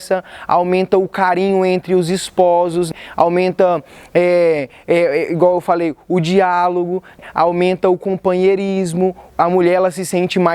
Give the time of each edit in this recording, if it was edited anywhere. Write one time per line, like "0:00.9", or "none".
0:02.9
0:07.2